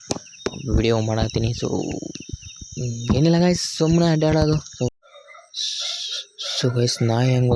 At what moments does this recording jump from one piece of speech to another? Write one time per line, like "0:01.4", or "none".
0:04.9